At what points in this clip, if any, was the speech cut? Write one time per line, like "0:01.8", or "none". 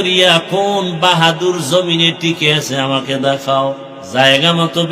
0:03.9